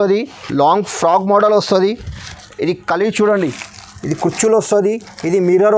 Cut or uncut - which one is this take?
uncut